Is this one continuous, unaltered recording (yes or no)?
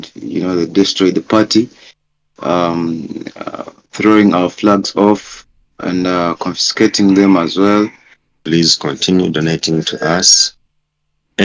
no